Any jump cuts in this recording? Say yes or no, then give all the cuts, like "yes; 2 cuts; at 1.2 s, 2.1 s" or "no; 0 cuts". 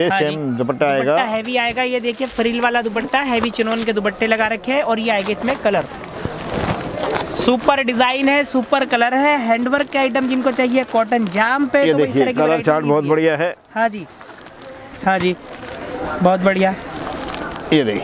no; 0 cuts